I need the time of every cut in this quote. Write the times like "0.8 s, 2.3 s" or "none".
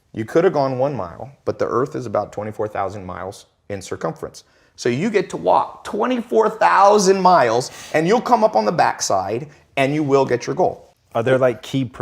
10.9 s